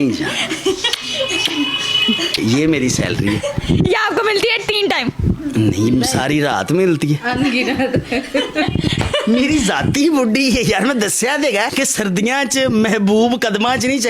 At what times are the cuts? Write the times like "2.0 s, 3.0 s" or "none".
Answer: none